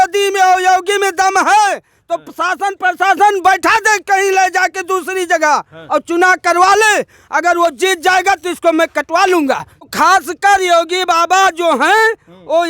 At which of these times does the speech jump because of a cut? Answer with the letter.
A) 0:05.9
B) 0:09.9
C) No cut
B